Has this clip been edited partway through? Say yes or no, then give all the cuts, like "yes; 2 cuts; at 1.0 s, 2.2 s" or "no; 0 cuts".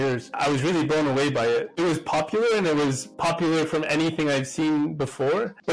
yes; 1 cut; at 1.7 s